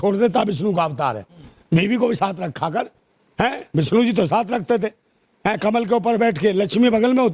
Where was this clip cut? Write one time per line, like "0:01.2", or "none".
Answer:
none

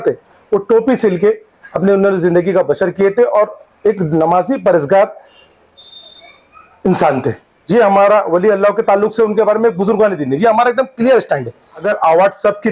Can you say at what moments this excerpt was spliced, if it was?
0:11.8

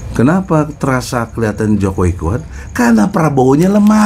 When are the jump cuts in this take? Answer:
none

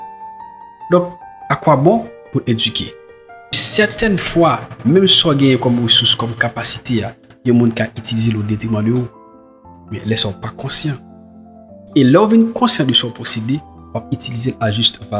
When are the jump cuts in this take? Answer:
0:03.6

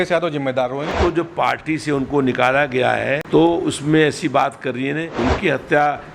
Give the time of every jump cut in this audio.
0:00.9
0:03.2
0:05.1

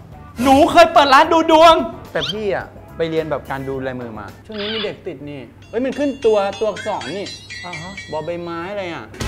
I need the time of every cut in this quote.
0:02.0
0:04.3

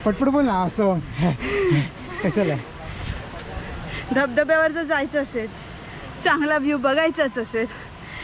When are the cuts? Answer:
none

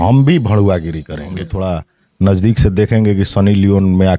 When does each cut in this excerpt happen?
0:01.5

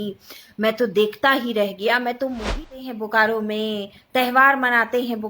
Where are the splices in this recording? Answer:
0:02.7

